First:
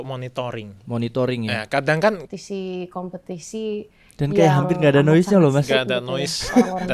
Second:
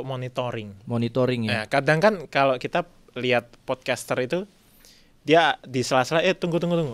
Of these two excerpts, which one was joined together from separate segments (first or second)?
first